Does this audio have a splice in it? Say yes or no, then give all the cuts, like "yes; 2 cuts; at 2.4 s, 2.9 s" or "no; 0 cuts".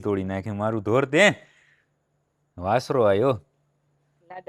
no; 0 cuts